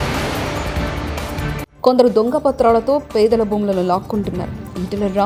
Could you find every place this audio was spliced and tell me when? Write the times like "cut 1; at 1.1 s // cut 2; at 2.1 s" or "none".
none